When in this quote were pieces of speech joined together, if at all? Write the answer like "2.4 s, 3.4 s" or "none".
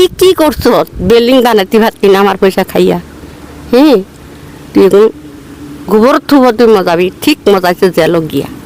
none